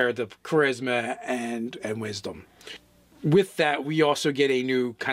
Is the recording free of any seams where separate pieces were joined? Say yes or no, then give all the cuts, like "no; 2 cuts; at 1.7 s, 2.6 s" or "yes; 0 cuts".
yes; 0 cuts